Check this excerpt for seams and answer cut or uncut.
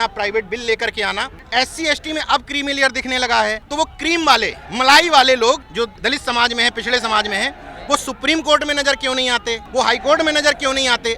cut